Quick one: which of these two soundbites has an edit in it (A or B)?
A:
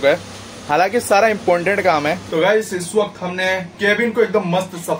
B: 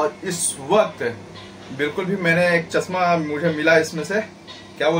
A